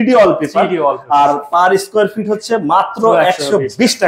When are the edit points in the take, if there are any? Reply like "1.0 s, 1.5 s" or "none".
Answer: none

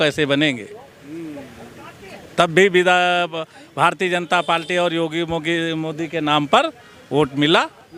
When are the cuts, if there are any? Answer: none

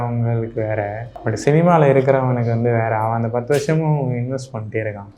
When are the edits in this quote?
1.1 s

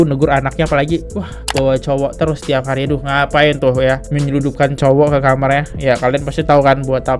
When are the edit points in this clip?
none

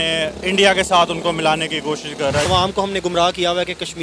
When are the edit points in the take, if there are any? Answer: 2.5 s

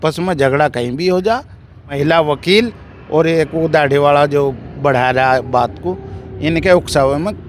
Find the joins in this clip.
1.9 s

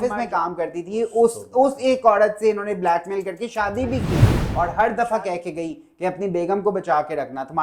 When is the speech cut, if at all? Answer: 4.1 s

